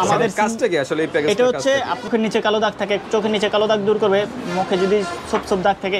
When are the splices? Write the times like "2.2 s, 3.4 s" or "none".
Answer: 2.1 s